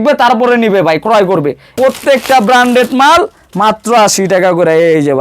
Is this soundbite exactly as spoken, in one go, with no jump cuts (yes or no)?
no